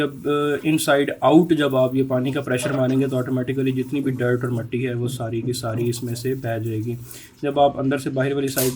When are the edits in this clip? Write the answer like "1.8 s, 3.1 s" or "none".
none